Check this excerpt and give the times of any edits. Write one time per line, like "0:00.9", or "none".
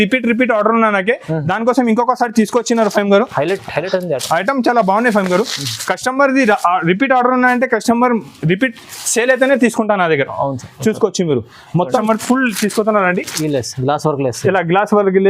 0:12.0